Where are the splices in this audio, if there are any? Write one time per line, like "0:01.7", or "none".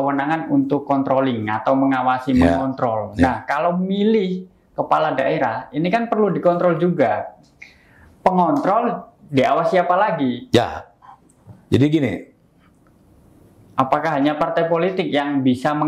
none